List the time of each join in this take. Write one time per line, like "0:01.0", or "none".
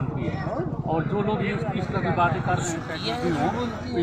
none